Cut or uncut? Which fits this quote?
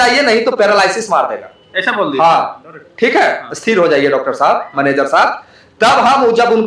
uncut